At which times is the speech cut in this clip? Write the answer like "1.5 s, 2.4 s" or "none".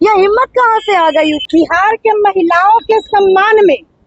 1.4 s